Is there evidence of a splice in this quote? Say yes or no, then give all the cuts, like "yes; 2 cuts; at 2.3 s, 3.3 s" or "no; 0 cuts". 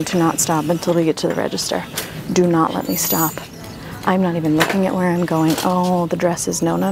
no; 0 cuts